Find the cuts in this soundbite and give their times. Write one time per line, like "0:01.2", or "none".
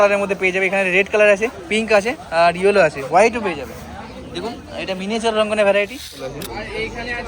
0:06.2